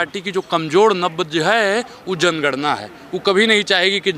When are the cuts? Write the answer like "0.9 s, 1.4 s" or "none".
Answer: none